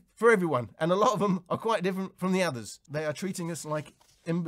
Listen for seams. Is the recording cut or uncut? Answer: cut